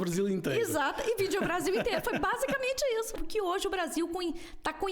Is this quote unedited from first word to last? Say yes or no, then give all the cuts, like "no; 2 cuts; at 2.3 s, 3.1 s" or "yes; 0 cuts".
no; 1 cut; at 3.2 s